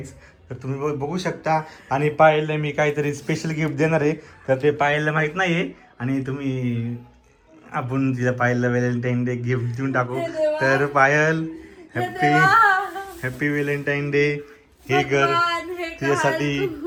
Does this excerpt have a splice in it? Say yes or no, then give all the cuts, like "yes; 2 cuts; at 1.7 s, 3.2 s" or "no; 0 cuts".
no; 0 cuts